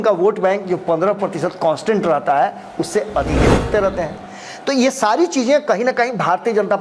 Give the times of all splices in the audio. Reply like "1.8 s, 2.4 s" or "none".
3.7 s